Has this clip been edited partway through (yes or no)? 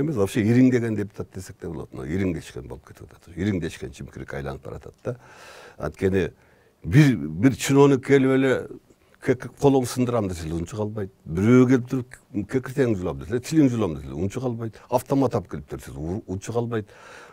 no